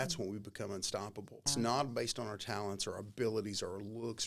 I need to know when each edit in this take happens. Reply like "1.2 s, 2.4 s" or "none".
1.5 s